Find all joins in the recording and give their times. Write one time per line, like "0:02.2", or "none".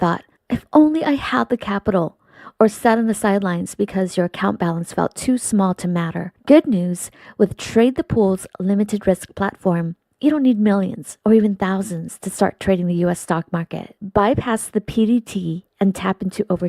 0:05.4